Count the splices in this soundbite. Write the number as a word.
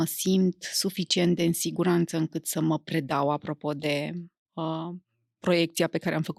zero